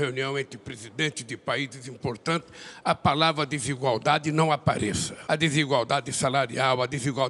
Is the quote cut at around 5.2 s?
no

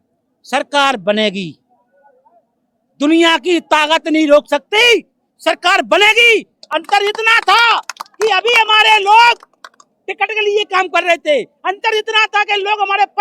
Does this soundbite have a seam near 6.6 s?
no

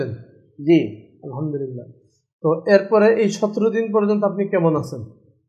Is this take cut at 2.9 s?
no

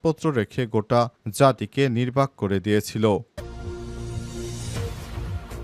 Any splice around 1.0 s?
no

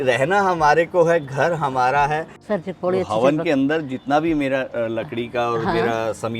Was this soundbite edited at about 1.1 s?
no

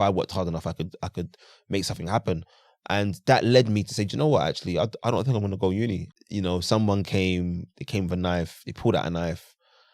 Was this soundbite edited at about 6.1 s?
yes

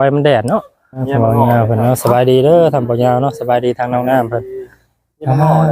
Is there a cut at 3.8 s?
no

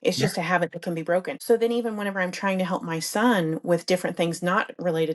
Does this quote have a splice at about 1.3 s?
yes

